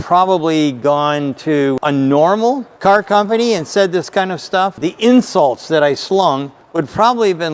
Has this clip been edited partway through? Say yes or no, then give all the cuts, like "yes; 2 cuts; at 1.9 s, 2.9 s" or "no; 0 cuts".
yes; 3 cuts; at 1.8 s, 2.7 s, 4.8 s